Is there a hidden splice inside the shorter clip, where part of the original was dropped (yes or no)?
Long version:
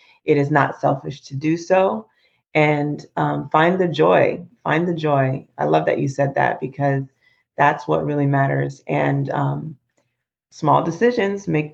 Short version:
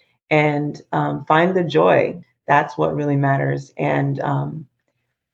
yes